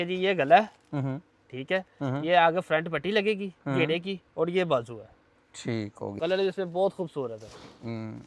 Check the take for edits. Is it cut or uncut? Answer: cut